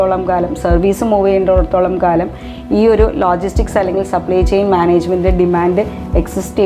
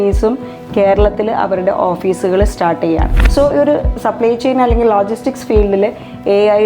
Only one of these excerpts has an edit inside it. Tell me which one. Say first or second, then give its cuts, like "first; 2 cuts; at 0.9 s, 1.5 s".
second; 1 cut; at 3.2 s